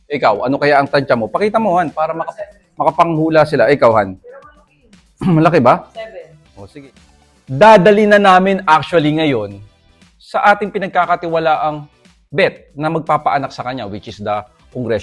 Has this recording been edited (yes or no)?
yes